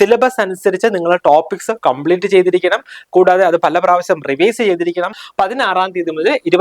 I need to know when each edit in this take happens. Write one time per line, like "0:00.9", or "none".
0:05.2